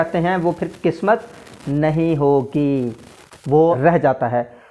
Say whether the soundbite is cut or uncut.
cut